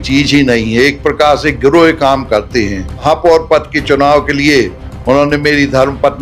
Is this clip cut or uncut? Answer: cut